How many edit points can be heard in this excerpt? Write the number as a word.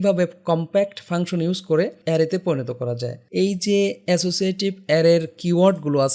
two